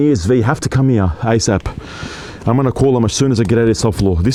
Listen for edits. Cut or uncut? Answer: uncut